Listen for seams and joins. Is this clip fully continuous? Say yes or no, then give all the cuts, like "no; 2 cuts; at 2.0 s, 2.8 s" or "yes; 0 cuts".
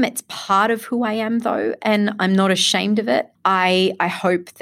no; 1 cut; at 3.3 s